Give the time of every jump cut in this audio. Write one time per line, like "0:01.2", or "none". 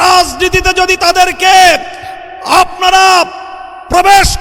none